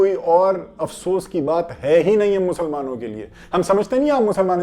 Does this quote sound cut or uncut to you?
uncut